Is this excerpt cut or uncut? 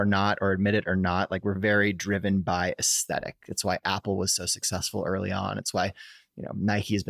uncut